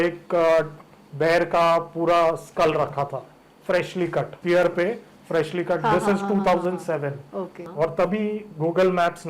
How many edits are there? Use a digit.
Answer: 2